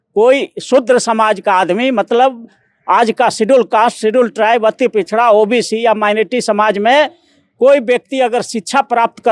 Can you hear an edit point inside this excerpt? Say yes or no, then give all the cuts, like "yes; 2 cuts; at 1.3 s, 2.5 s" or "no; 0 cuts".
no; 0 cuts